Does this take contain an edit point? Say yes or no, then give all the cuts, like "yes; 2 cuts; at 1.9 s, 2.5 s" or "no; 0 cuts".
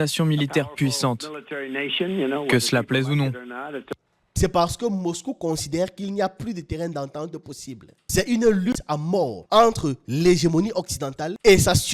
yes; 1 cut; at 4.2 s